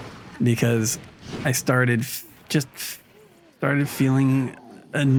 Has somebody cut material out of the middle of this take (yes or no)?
no